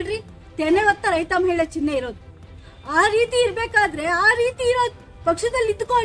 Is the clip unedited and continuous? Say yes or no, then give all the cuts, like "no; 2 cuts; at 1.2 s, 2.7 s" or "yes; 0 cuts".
yes; 0 cuts